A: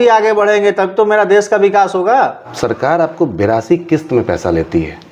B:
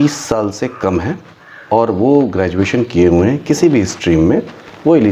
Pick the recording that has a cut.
A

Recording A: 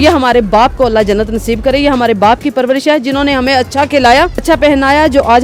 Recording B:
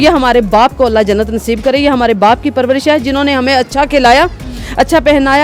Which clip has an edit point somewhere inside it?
A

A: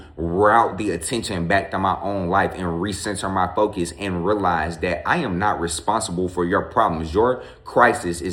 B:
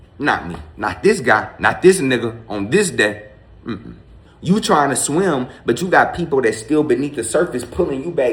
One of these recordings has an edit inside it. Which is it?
B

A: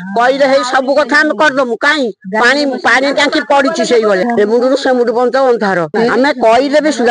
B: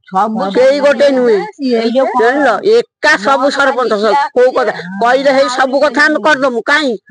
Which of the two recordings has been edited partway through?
A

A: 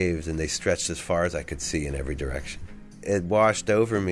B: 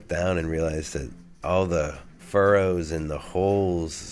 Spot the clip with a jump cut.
A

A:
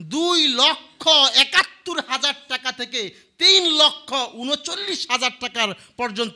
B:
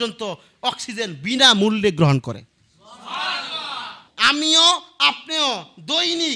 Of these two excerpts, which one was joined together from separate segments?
B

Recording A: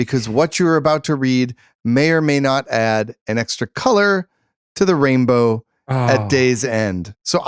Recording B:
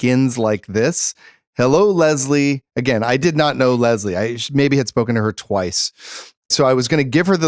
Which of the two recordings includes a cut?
B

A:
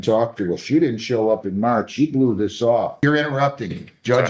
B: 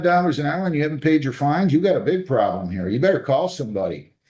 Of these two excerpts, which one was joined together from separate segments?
A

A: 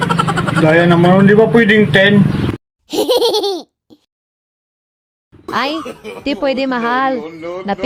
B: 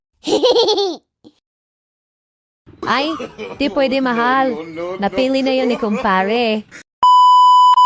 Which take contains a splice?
B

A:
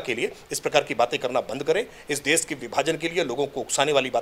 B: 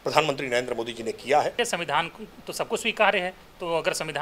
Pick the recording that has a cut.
B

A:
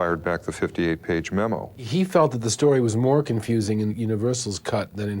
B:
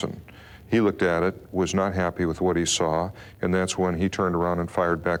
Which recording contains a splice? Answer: A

